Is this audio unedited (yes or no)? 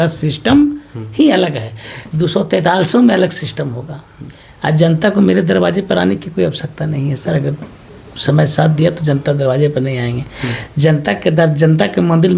yes